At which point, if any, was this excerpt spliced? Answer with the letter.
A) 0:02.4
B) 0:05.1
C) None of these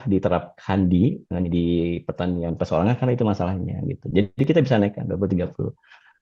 C